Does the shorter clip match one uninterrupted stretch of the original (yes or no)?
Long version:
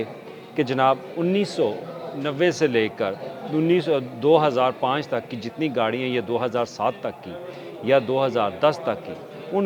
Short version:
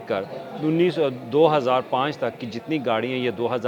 yes